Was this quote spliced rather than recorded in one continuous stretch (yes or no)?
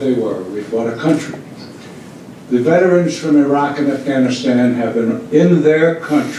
yes